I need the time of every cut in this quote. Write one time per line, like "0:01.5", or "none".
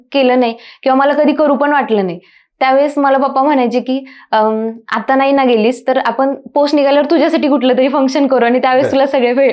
none